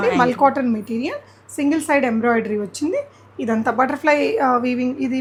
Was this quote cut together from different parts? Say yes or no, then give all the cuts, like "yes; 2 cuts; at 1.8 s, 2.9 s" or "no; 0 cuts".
no; 0 cuts